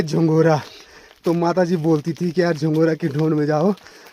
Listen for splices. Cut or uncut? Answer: uncut